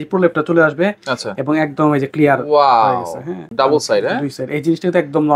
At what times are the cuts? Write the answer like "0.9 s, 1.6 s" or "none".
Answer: 3.4 s